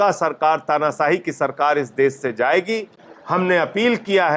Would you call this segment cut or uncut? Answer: uncut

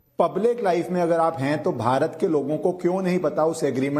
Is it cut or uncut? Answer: uncut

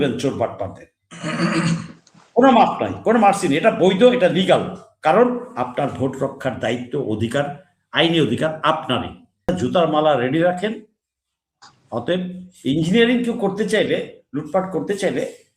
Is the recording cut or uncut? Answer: cut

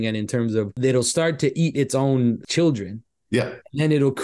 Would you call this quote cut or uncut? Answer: cut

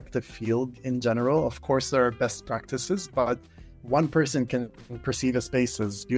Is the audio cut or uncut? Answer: uncut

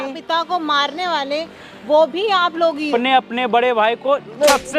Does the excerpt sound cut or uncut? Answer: cut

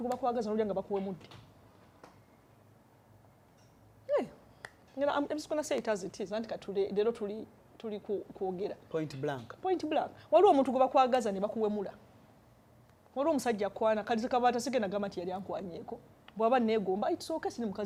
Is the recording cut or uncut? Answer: uncut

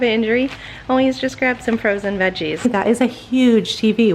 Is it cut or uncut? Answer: cut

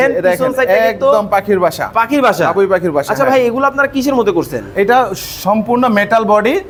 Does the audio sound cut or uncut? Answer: uncut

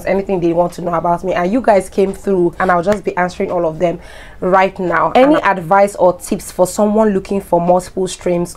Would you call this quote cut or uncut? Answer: cut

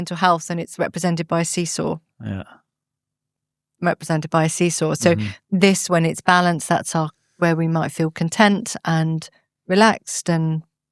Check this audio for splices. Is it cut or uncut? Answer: uncut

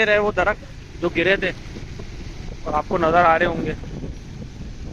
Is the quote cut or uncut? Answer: uncut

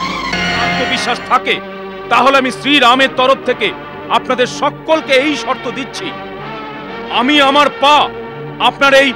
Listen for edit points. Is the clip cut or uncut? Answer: cut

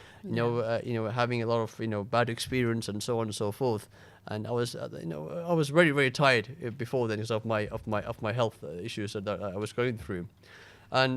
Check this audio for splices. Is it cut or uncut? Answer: uncut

